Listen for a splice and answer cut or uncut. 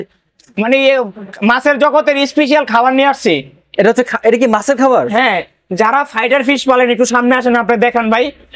uncut